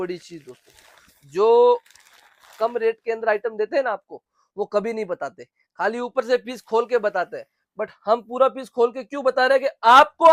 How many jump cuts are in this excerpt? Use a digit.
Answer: 0